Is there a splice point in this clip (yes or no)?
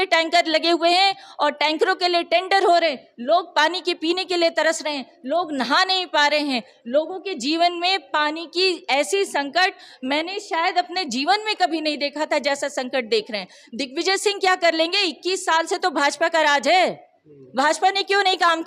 no